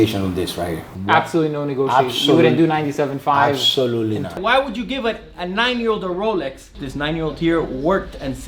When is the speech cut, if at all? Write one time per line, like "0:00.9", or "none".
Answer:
0:00.9
0:04.4
0:06.7